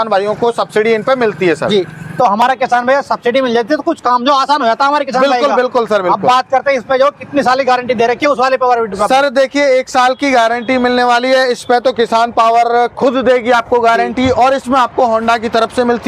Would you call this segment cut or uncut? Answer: uncut